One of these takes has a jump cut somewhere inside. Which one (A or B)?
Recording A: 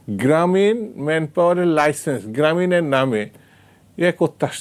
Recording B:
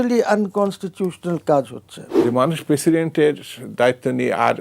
B